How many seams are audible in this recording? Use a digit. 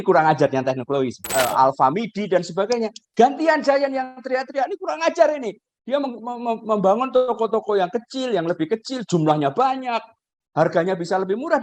1